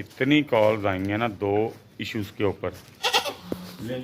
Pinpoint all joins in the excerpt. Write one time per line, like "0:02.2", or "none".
0:02.9